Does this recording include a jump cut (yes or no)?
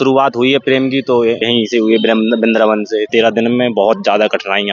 yes